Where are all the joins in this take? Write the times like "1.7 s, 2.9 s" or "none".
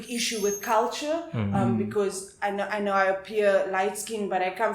none